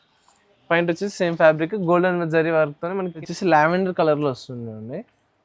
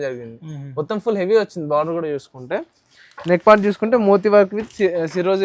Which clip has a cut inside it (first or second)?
first